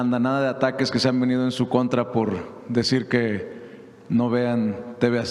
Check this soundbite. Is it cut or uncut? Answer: uncut